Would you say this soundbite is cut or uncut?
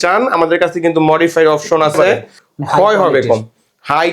cut